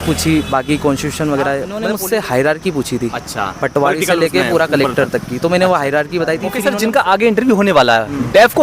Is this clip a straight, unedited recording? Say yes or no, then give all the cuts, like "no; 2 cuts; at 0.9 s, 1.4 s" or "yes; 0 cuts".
no; 2 cuts; at 1.9 s, 6.5 s